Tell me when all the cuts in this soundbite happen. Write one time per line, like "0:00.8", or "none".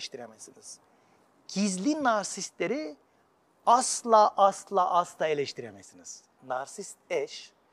0:06.4